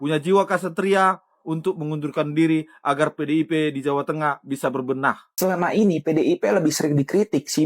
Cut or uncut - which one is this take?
cut